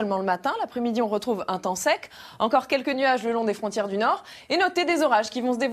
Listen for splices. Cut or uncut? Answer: uncut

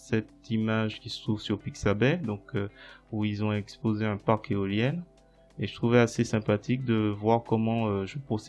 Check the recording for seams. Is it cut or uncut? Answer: uncut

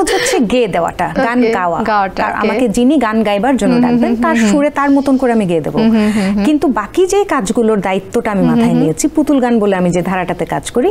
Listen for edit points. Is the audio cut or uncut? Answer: uncut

